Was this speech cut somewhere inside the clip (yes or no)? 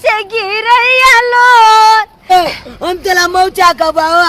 yes